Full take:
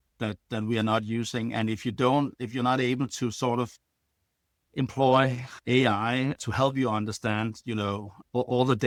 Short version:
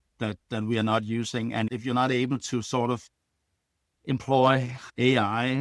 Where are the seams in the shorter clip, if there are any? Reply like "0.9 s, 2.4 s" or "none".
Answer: 1.7 s